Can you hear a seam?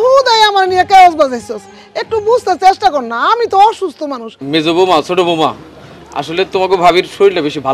yes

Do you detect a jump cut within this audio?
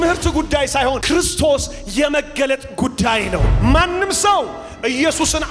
yes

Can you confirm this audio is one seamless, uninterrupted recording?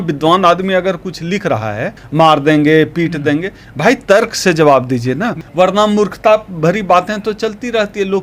no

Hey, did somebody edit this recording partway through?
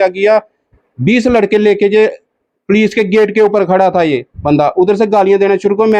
no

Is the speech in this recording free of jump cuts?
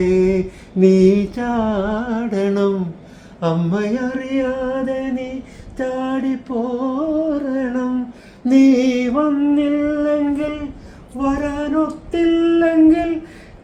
yes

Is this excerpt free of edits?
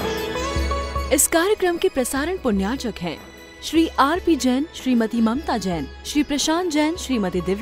no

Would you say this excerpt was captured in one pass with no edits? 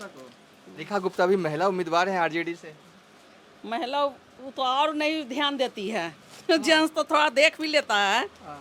yes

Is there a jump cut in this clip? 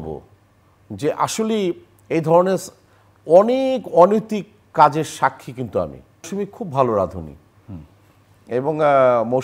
yes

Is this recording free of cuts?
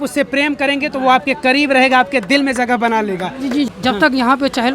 no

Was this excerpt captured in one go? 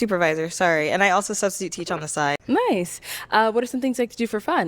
no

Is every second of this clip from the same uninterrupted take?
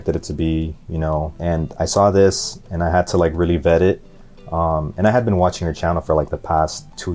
no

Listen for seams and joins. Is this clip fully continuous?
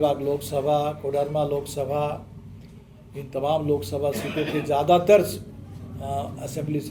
yes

